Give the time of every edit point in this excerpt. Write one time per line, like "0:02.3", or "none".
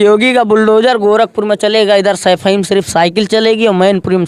none

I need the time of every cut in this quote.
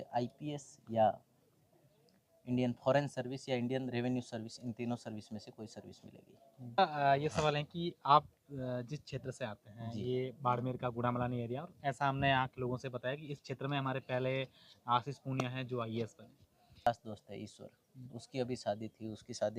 0:06.8
0:16.9

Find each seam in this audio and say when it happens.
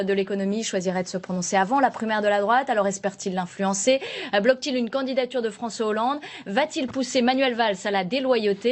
none

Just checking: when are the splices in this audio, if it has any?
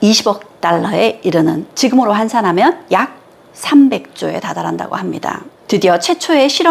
0:05.5

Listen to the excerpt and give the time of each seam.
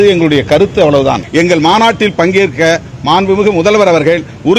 0:01.2

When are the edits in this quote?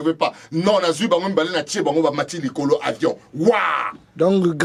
none

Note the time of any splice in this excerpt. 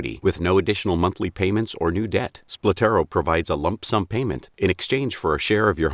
0:04.1

